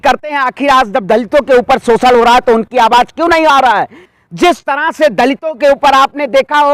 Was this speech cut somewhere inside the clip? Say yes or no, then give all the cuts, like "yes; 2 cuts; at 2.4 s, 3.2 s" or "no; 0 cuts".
yes; 1 cut; at 4.0 s